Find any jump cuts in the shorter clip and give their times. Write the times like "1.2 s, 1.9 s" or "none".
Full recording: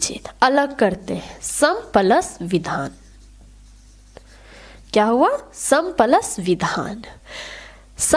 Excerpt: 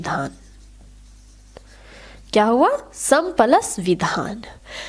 none